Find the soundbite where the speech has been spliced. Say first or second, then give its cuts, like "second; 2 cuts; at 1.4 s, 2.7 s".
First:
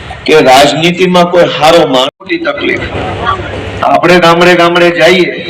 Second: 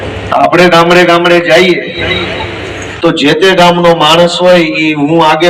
first; 1 cut; at 2.1 s